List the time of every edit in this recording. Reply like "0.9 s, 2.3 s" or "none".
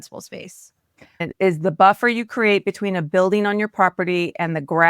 1.2 s